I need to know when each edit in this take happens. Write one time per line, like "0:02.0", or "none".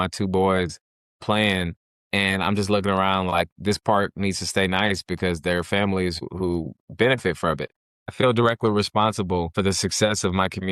0:06.2
0:08.1
0:09.5